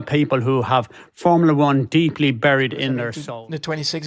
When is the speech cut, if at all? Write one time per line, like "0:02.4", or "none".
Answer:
0:03.1